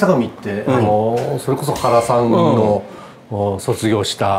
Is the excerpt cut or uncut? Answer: uncut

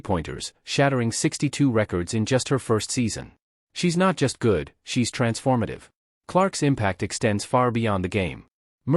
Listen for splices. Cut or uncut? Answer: cut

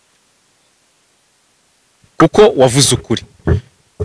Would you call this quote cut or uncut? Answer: uncut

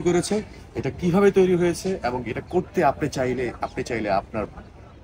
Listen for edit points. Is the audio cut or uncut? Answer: uncut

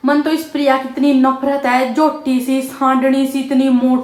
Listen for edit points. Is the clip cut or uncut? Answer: uncut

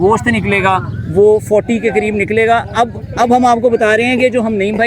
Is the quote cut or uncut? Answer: uncut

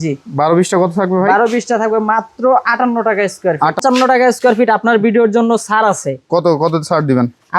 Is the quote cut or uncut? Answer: cut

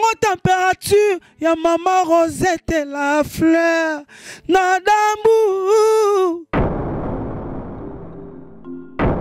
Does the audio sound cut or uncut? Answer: uncut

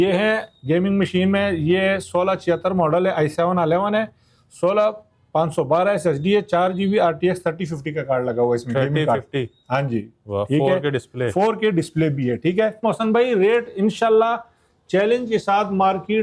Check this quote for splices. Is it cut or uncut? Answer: cut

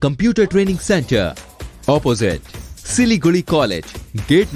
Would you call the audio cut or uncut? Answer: uncut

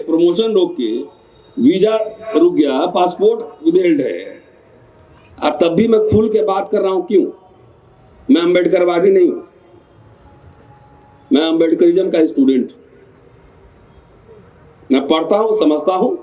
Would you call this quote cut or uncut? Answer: uncut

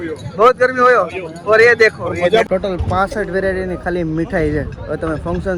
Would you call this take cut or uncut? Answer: cut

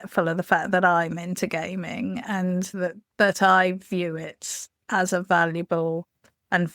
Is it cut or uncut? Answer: uncut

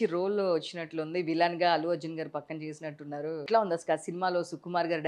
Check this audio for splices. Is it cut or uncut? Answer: cut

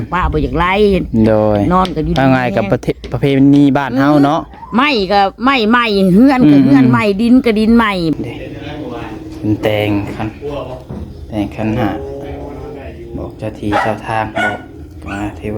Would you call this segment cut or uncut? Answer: cut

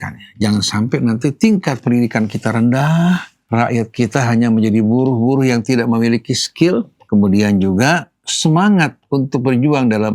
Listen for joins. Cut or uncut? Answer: cut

